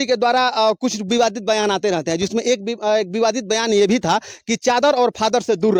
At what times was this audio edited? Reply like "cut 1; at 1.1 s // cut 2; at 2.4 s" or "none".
none